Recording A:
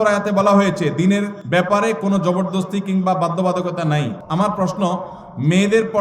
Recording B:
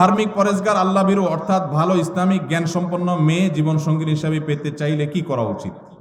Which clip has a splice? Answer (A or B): A